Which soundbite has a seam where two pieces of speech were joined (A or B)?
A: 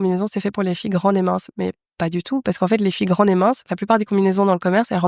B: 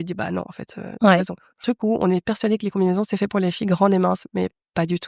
B